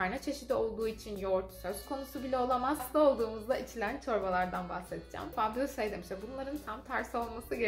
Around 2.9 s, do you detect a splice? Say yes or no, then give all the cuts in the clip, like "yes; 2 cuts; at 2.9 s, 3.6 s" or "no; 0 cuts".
yes; 2 cuts; at 2.9 s, 5.3 s